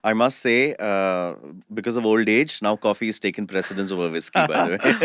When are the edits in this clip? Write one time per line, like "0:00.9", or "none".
none